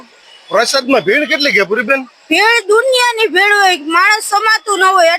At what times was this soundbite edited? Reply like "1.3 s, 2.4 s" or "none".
none